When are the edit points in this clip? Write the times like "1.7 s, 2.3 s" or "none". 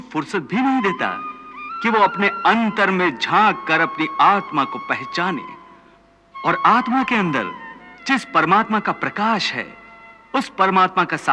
none